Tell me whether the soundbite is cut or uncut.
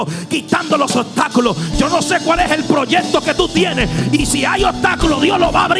uncut